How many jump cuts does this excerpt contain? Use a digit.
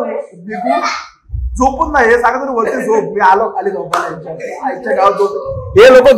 0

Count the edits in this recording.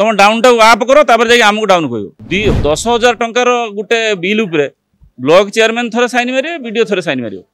1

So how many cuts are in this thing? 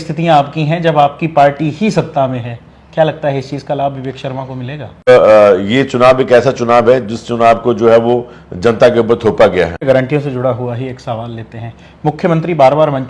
2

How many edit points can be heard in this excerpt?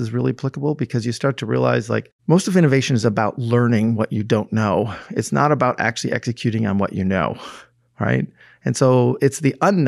1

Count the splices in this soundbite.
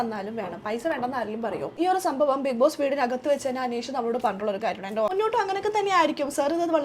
2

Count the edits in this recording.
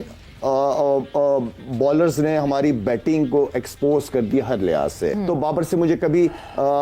1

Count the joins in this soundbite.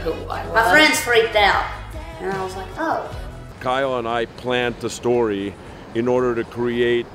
1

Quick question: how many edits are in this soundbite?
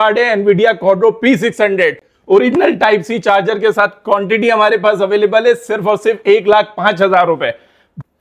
0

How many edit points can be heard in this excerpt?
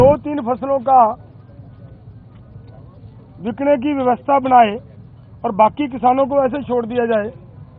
0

